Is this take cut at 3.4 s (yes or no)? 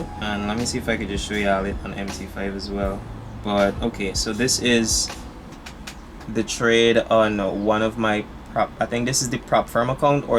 no